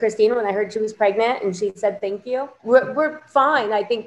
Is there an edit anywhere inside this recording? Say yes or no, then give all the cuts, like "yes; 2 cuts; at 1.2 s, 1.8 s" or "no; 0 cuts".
yes; 1 cut; at 2.6 s